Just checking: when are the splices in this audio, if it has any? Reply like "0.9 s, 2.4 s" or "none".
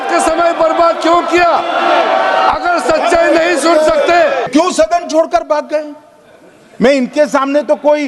4.5 s